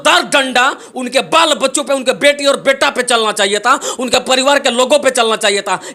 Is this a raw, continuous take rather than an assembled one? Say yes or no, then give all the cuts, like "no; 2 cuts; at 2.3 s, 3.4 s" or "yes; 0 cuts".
yes; 0 cuts